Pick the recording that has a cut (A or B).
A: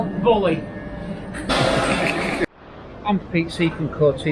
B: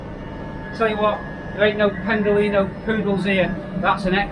A